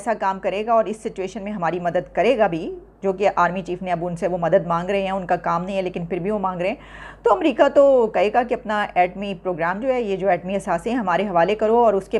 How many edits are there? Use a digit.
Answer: 0